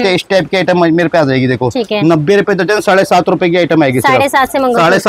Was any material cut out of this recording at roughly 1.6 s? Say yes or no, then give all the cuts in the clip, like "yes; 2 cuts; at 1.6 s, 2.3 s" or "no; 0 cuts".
no; 0 cuts